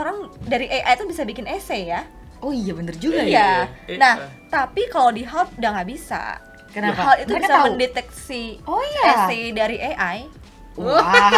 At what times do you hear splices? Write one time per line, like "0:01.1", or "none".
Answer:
none